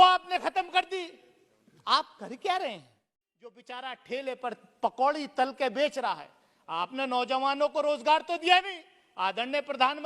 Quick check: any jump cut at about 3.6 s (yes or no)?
yes